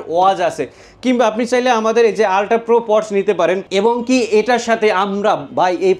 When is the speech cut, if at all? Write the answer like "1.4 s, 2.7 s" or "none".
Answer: 3.6 s